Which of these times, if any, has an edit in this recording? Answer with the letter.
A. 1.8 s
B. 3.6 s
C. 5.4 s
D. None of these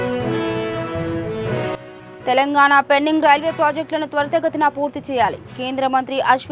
A